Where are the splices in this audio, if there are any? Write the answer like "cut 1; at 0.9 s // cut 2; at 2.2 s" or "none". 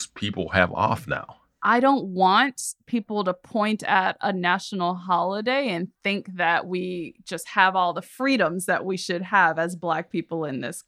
cut 1; at 1.4 s